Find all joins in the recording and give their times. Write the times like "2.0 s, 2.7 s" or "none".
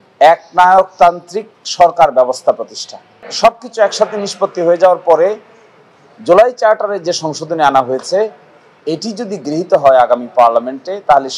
3.3 s

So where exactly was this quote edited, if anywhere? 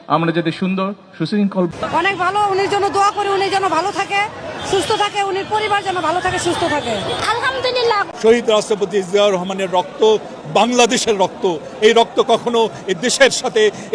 1.7 s, 8.1 s

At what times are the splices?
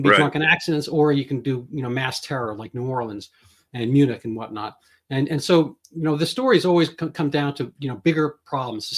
none

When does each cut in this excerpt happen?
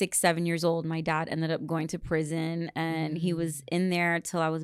none

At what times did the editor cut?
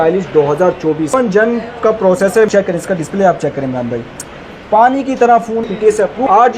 1.1 s, 2.5 s, 5.6 s

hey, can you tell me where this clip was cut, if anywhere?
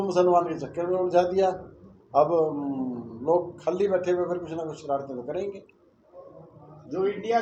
none

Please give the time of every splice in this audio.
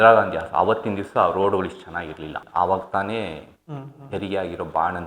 2.4 s

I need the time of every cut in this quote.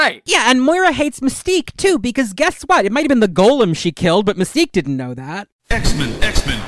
5.3 s

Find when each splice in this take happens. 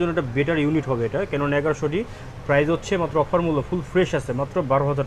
none

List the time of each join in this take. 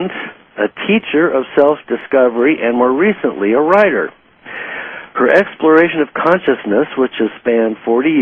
3.7 s

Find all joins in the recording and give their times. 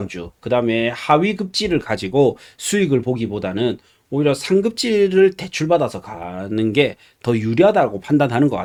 none

